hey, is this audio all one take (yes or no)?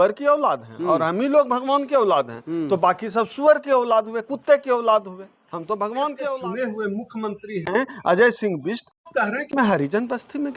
no